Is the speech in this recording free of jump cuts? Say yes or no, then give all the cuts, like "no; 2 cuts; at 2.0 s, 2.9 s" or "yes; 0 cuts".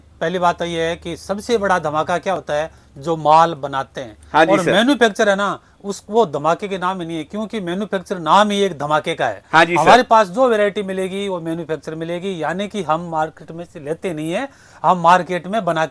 yes; 0 cuts